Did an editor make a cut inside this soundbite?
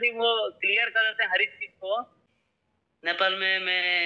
yes; 1 cut; at 2.2 s

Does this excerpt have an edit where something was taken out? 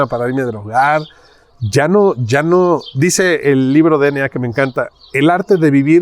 no; 0 cuts

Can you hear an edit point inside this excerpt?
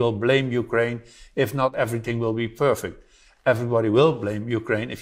yes; 1 cut; at 1.7 s

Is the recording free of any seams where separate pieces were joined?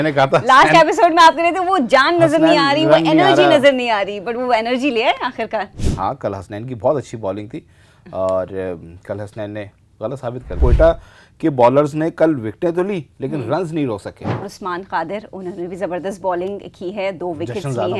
no; 2 cuts; at 10.6 s, 14.4 s

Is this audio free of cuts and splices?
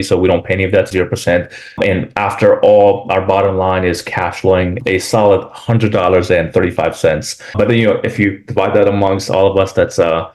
yes; 0 cuts

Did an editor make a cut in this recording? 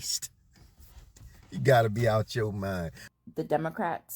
yes; 1 cut; at 3.0 s

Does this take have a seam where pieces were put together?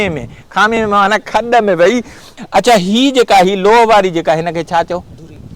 yes; 1 cut; at 2.3 s

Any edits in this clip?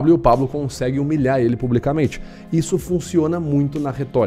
no; 0 cuts

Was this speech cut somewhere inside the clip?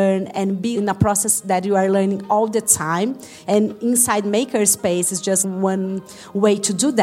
yes; 3 cuts; at 0.7 s, 3.3 s, 5.4 s

